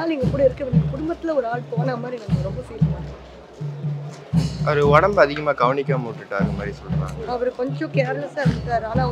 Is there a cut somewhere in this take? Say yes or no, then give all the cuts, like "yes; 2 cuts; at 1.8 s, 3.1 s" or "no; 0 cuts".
no; 0 cuts